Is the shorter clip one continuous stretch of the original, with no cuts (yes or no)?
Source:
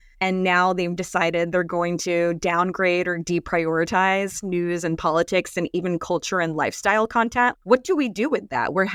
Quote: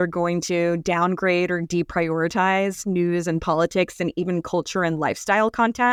yes